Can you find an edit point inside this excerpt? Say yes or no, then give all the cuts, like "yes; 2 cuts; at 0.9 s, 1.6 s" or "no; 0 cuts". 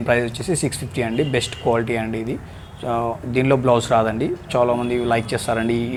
no; 0 cuts